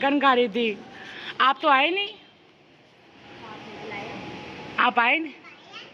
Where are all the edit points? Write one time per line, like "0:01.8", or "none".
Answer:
none